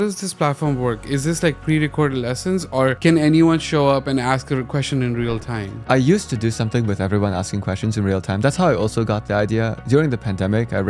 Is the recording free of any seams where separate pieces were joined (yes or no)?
yes